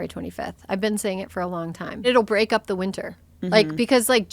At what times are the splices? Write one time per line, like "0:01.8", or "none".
0:02.1